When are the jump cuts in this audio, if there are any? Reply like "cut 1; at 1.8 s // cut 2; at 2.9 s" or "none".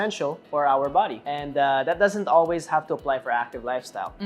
cut 1; at 1.2 s